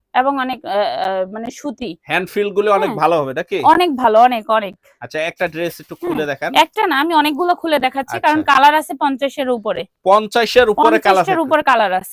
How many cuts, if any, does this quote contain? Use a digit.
0